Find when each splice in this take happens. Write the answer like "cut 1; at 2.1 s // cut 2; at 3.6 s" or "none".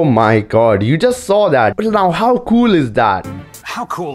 cut 1; at 1.8 s // cut 2; at 3.2 s